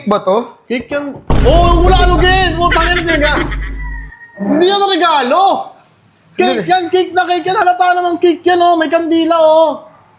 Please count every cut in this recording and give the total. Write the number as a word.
zero